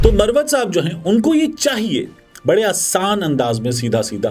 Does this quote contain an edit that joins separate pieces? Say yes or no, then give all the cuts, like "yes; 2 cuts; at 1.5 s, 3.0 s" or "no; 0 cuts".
no; 0 cuts